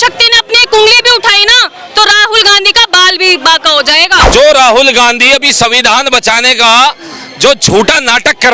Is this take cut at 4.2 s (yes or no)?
yes